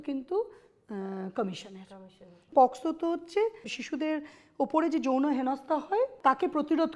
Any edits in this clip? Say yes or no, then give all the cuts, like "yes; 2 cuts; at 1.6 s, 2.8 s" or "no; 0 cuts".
yes; 3 cuts; at 2.5 s, 3.7 s, 6.1 s